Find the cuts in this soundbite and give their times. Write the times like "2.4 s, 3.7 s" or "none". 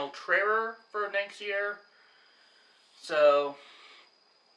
none